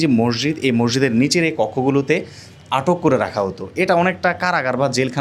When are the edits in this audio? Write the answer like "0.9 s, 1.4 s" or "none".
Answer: none